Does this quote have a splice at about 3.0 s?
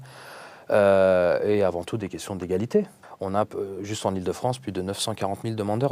yes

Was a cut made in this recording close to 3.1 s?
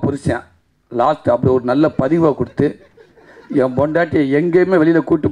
no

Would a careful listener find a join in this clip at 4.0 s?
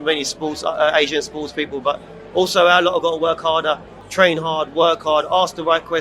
yes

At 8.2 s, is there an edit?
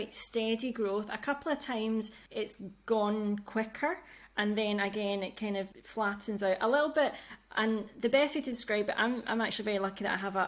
no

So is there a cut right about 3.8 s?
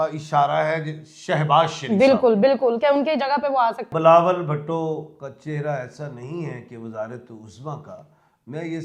yes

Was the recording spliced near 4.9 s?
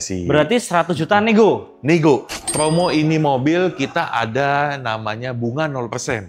no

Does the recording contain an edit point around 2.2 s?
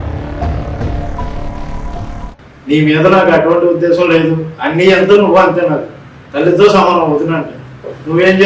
yes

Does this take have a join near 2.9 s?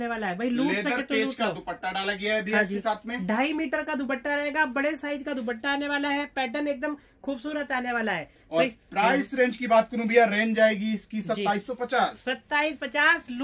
no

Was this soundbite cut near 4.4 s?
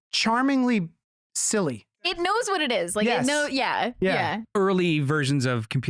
yes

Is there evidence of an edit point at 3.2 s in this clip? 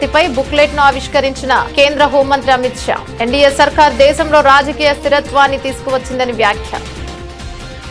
no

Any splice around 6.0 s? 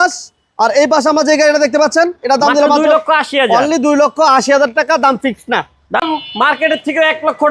yes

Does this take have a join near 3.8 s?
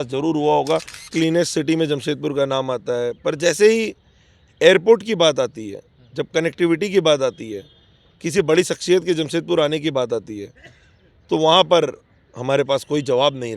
no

